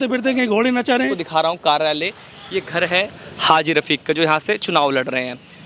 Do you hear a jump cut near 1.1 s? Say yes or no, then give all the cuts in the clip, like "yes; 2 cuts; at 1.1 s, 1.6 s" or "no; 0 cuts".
yes; 1 cut; at 1.1 s